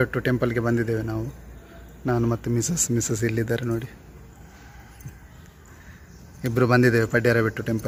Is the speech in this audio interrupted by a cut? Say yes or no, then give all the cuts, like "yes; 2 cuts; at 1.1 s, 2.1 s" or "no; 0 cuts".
no; 0 cuts